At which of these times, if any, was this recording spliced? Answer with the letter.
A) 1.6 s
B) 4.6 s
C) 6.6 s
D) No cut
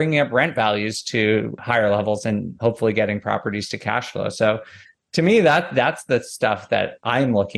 A